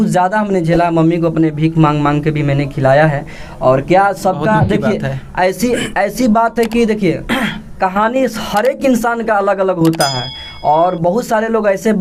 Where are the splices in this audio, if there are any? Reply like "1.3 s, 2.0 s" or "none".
none